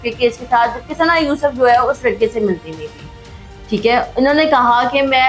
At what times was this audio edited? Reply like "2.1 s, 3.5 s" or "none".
none